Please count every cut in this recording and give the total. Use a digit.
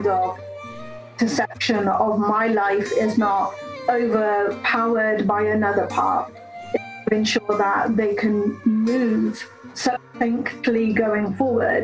0